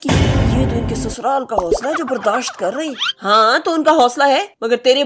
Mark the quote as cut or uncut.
uncut